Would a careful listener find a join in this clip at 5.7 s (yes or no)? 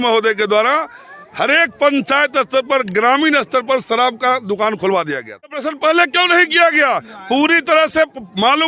yes